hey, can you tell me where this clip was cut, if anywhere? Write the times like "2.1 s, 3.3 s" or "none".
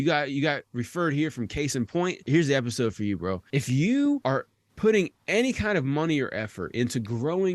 2.3 s, 3.4 s, 4.2 s